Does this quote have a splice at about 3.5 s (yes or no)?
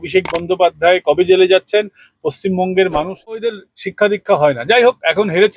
yes